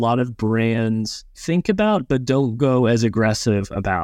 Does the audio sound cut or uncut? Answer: cut